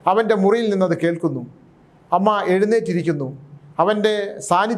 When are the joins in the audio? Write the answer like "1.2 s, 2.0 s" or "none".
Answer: none